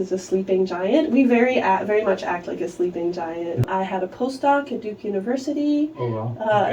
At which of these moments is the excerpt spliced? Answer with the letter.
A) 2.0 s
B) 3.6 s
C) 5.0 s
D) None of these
B